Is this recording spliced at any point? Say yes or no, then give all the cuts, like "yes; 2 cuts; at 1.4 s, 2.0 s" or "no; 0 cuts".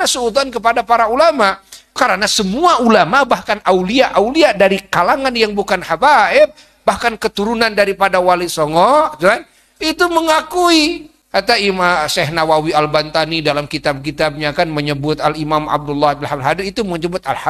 yes; 2 cuts; at 2.0 s, 11.1 s